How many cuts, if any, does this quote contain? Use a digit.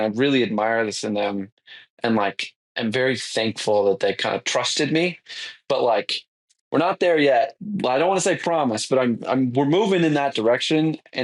1